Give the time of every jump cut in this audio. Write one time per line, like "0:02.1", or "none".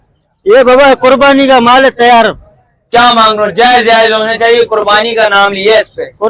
none